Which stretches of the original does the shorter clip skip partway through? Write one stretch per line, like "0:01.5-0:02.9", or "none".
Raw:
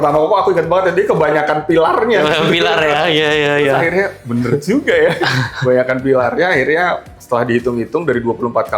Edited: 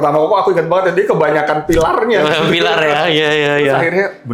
none